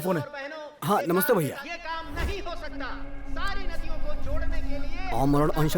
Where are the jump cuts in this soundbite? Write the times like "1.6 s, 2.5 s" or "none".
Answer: 1.6 s, 3.3 s